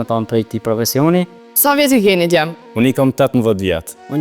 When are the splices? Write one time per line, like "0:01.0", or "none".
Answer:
0:01.4